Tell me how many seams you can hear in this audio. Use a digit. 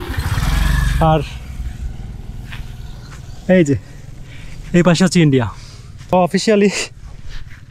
1